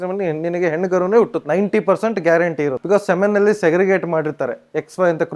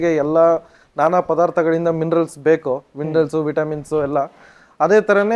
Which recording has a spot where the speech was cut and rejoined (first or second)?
first